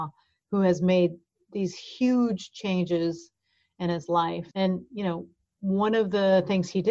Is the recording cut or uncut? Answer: cut